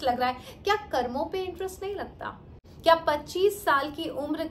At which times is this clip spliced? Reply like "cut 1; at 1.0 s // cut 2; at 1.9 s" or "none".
none